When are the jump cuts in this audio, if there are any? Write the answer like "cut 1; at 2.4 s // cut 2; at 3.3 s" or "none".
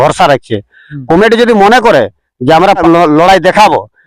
cut 1; at 2.8 s